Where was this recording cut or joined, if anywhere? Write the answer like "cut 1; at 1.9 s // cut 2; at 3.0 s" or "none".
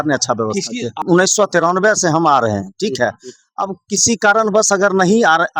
cut 1; at 1.0 s